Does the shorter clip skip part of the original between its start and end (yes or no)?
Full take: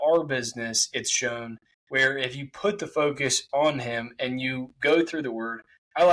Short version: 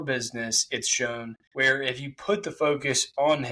yes